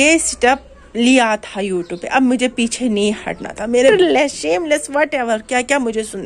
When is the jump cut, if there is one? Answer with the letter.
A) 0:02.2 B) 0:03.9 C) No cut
B